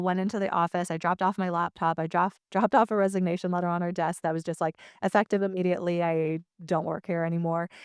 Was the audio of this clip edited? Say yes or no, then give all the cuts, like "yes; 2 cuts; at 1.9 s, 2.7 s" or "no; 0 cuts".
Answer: no; 0 cuts